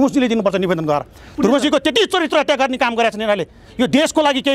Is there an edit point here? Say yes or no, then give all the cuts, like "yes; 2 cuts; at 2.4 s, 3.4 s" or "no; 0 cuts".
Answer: no; 0 cuts